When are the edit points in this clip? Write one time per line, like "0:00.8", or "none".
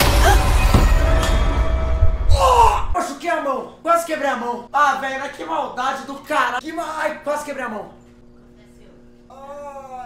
0:02.9